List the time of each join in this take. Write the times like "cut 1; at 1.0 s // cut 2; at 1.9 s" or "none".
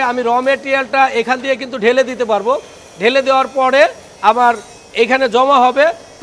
none